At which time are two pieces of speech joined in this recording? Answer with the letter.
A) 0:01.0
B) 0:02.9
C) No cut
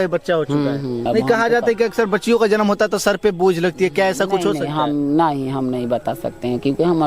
A